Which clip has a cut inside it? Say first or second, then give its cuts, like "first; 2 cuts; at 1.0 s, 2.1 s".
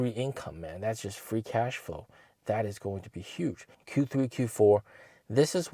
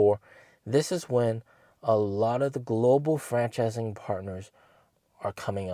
first; 1 cut; at 3.7 s